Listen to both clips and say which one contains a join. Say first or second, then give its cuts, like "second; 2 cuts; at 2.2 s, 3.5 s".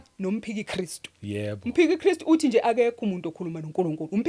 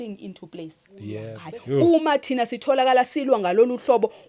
second; 1 cut; at 1.3 s